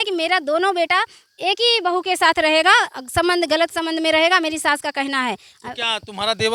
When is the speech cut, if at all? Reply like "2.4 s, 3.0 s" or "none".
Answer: none